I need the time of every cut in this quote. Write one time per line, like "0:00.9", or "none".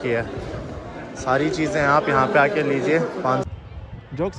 0:03.5